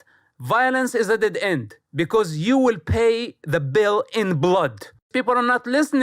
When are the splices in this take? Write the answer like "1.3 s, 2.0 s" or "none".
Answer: 5.1 s